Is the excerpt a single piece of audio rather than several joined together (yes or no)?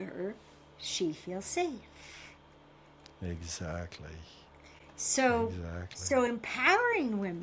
yes